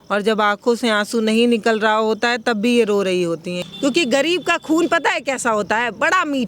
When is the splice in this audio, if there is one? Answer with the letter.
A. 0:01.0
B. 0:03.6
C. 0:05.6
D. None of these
B